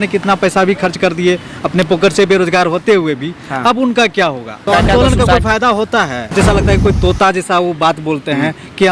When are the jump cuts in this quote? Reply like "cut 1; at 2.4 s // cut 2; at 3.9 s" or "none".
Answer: cut 1; at 4.7 s // cut 2; at 6.3 s